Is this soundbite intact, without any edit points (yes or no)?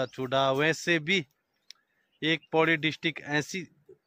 yes